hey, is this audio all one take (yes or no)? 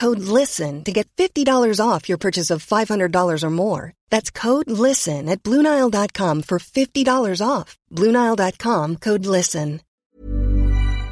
no